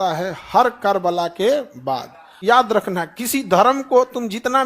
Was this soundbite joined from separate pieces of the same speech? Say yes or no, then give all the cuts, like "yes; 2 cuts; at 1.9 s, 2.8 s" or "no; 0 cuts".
yes; 1 cut; at 2.3 s